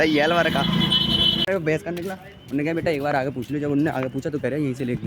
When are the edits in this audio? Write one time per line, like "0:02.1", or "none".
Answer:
0:01.5